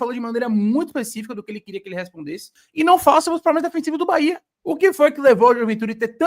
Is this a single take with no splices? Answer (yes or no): no